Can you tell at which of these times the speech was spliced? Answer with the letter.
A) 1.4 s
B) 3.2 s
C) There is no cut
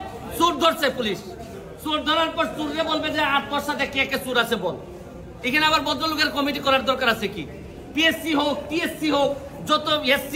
C